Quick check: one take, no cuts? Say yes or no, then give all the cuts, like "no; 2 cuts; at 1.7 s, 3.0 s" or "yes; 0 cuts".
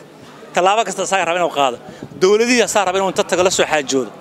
yes; 0 cuts